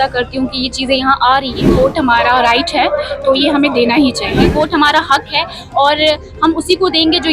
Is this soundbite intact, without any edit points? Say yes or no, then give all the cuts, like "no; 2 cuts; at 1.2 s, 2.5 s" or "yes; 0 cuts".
no; 2 cuts; at 1.7 s, 4.5 s